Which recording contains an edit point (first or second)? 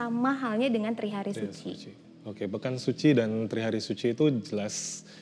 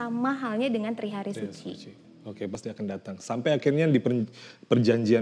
second